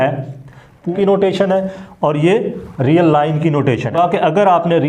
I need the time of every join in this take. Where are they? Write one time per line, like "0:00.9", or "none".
0:00.9
0:03.9